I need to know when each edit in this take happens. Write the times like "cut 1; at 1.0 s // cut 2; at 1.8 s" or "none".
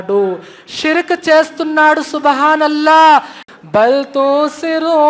cut 1; at 3.4 s